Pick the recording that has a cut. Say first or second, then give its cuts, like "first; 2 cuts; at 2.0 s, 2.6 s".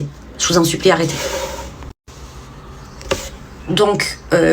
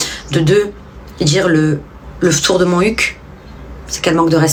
first; 1 cut; at 1.9 s